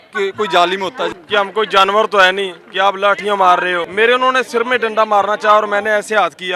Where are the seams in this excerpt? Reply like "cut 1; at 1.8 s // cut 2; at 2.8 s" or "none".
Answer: cut 1; at 1.1 s // cut 2; at 3.8 s

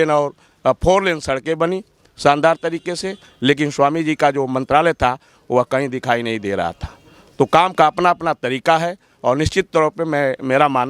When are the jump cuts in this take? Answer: none

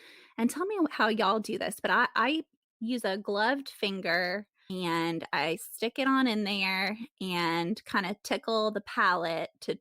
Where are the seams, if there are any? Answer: cut 1; at 4.6 s

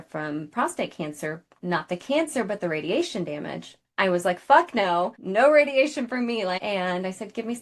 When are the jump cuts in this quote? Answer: cut 1; at 5.2 s // cut 2; at 6.6 s

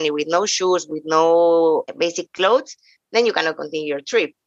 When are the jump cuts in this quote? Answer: cut 1; at 1.9 s

